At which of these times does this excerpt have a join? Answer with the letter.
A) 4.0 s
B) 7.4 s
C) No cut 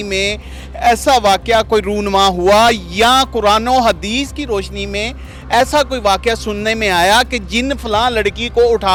C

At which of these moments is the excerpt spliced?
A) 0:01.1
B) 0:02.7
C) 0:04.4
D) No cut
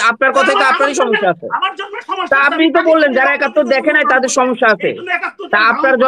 D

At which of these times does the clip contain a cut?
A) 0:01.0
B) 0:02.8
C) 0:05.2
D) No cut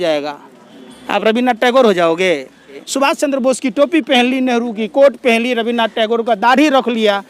B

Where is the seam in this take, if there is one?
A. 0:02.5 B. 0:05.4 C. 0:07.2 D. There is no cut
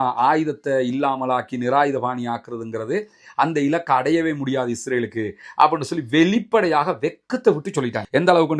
D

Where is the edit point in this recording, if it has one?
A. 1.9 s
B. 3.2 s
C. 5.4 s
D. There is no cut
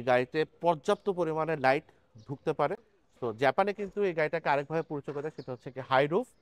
B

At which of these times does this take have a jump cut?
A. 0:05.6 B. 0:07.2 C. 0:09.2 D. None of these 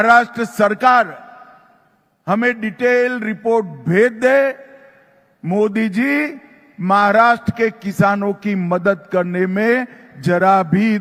D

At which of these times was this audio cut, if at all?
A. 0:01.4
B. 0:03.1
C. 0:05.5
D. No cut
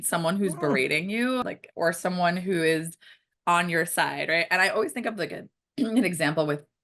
A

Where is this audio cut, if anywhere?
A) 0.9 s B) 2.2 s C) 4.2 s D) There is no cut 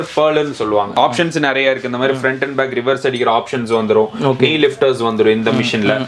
A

